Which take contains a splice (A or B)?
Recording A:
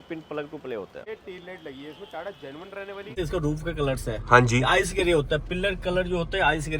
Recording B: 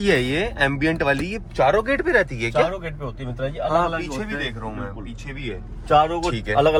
A